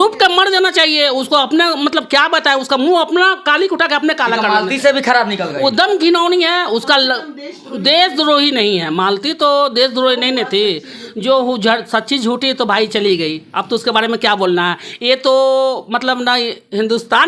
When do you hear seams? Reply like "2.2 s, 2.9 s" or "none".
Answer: none